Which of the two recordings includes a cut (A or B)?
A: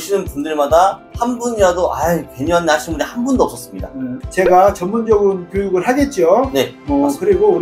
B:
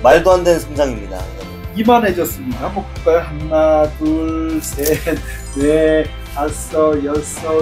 A